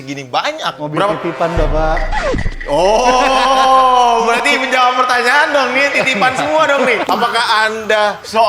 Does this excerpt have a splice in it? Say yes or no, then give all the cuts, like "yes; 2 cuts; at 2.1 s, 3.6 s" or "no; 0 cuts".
yes; 1 cut; at 7.1 s